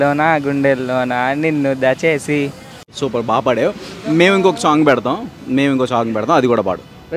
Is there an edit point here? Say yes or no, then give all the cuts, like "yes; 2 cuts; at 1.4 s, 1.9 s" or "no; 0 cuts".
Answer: no; 0 cuts